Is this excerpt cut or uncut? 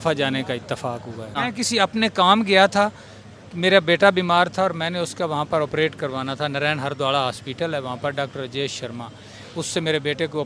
cut